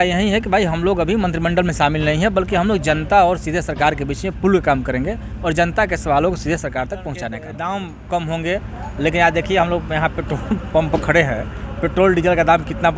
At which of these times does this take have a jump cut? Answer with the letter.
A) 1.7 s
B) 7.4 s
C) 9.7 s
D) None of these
B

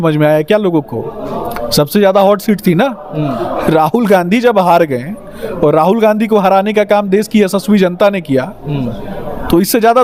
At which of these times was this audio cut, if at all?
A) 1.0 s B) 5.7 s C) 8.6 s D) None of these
D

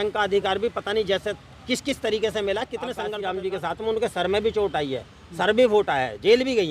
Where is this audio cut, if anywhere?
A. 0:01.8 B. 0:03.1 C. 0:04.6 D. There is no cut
B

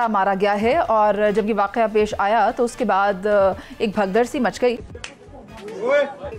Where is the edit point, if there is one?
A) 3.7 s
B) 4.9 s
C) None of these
B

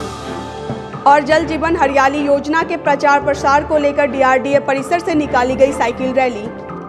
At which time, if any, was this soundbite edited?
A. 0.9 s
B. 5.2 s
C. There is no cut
A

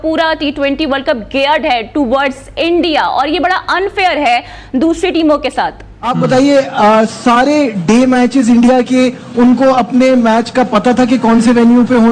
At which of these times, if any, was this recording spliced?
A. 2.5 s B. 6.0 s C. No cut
B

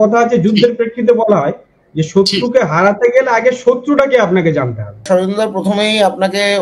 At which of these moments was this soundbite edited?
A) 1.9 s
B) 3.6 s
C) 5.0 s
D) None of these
C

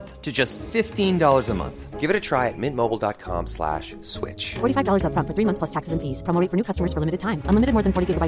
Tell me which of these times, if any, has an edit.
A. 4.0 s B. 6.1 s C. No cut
C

